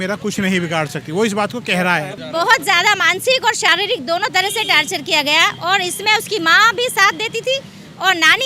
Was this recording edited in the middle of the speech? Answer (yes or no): yes